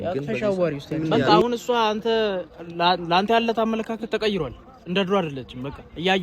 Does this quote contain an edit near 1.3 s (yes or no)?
yes